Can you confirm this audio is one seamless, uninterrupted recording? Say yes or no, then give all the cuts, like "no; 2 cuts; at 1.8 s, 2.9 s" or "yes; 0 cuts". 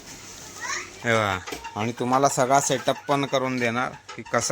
no; 1 cut; at 1.0 s